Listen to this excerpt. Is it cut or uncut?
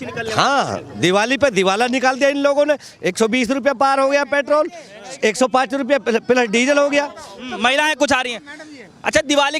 uncut